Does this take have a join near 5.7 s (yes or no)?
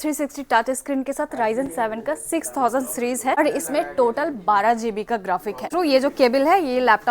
yes